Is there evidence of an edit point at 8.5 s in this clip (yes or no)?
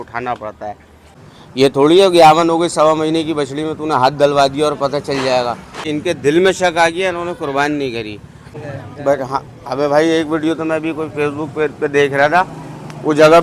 yes